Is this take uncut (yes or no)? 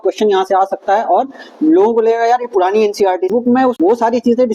no